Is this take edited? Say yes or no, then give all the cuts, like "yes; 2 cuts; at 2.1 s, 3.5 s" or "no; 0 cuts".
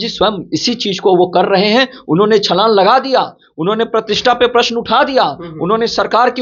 no; 0 cuts